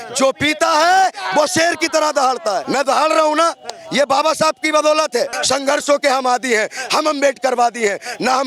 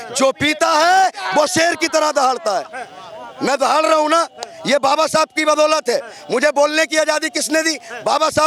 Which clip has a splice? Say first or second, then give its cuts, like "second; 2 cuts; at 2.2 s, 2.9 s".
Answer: first; 2 cuts; at 2.6 s, 5.4 s